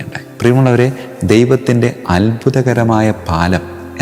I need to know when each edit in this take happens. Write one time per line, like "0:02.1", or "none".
none